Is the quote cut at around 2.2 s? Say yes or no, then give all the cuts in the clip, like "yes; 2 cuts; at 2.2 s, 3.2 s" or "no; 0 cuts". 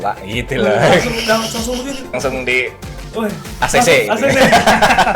yes; 1 cut; at 2.2 s